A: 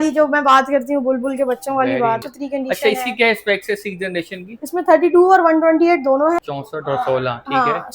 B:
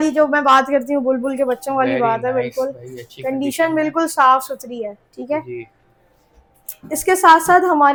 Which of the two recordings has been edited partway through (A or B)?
A